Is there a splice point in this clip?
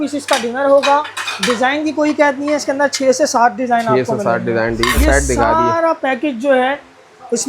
yes; 1 cut; at 5.0 s

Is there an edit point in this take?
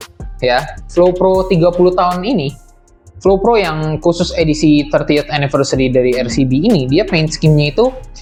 no; 0 cuts

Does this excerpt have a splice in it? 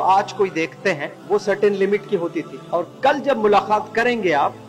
yes; 2 cuts; at 1.1 s, 2.5 s

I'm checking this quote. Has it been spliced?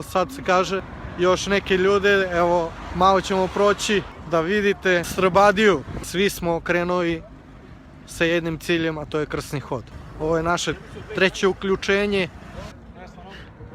yes; 6 cuts; at 1.0 s, 4.2 s, 5.1 s, 6.0 s, 10.0 s, 12.7 s

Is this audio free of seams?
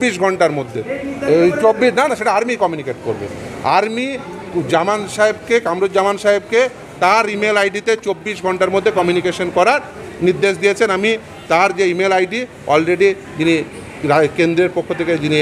yes; 0 cuts

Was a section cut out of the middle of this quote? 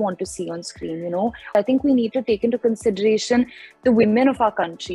yes; 1 cut; at 1.5 s

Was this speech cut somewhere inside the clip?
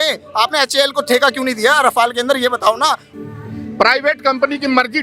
yes; 1 cut; at 3.0 s

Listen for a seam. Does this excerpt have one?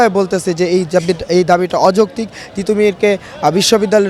no; 0 cuts

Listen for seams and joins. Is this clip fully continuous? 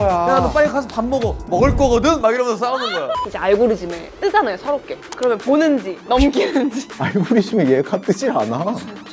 no; 5 cuts; at 3.3 s, 4.0 s, 5.0 s, 5.9 s, 6.9 s

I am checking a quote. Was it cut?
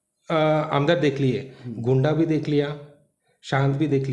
no; 0 cuts

